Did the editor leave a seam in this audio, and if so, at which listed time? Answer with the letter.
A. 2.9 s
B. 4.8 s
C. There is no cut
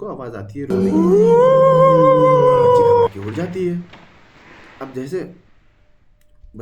C